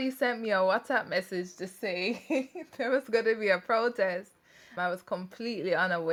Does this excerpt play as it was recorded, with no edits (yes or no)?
yes